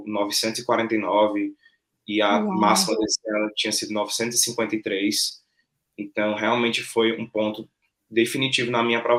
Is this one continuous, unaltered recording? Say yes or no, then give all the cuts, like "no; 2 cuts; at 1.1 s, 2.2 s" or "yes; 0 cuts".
yes; 0 cuts